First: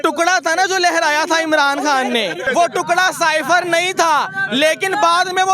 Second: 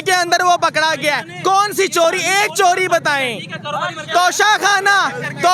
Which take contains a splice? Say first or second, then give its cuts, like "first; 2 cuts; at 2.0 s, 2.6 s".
first; 1 cut; at 2.4 s